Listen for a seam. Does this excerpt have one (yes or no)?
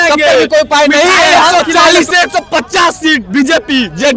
yes